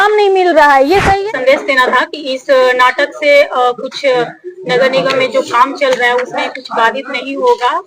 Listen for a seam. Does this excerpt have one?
yes; 1 cut; at 1.2 s

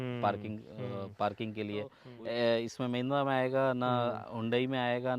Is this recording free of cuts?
no; 1 cut; at 2.0 s

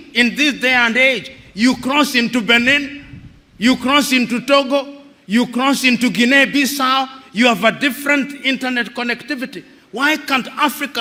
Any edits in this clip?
no; 0 cuts

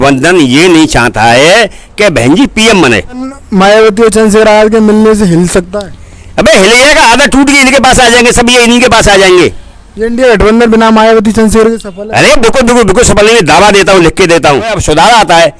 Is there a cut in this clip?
yes; 2 cuts; at 3.4 s, 14.8 s

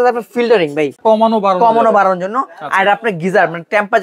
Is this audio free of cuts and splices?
no; 1 cut; at 1.0 s

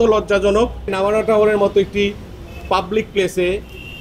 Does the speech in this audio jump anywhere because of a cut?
yes; 1 cut; at 0.9 s

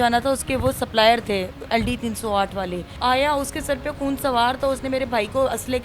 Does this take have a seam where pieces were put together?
yes; 1 cut; at 2.9 s

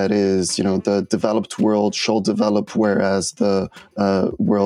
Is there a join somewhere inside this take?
no; 0 cuts

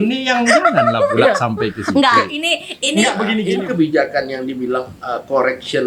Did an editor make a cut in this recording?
yes; 1 cut; at 3.4 s

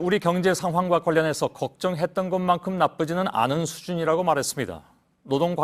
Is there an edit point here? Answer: no; 0 cuts

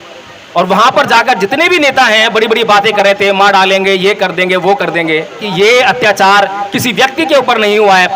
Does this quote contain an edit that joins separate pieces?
yes; 1 cut; at 5.5 s

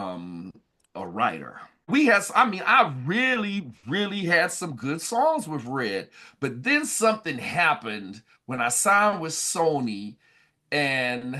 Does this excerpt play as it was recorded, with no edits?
no; 1 cut; at 1.9 s

